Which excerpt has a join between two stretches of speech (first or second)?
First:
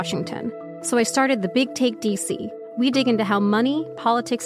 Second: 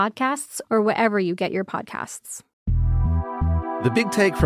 second